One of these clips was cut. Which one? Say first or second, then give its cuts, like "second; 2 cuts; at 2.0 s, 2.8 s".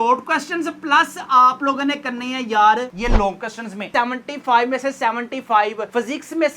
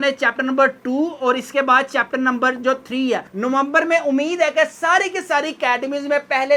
first; 1 cut; at 3.9 s